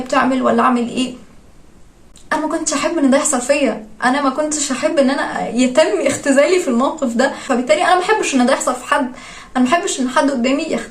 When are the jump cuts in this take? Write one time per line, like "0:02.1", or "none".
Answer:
none